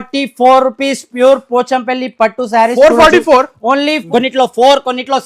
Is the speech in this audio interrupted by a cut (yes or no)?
yes